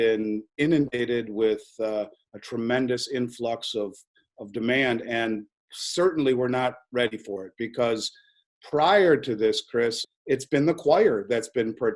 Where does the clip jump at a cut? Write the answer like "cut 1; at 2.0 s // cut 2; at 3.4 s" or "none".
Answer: cut 1; at 10.0 s

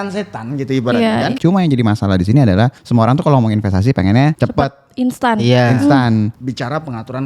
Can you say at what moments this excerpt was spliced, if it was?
cut 1; at 1.4 s // cut 2; at 2.8 s // cut 3; at 4.4 s // cut 4; at 6.4 s

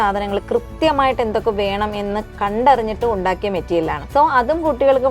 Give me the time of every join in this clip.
cut 1; at 2.3 s // cut 2; at 4.0 s

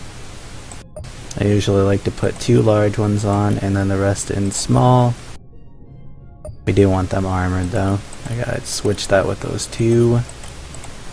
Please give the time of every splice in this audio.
none

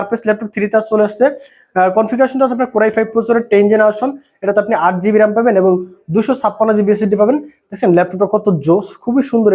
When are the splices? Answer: none

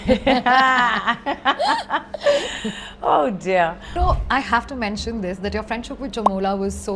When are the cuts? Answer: cut 1; at 3.9 s

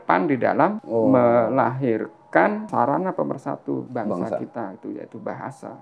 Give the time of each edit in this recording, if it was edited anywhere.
cut 1; at 0.8 s // cut 2; at 2.7 s // cut 3; at 3.9 s

